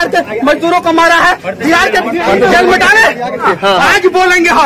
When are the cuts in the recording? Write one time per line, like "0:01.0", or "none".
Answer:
0:03.4